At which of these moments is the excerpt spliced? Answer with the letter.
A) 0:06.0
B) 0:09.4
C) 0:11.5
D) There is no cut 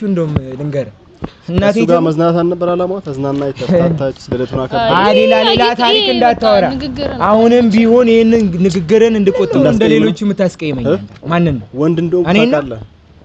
B